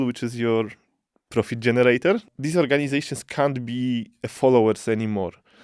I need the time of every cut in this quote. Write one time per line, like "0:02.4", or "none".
0:02.3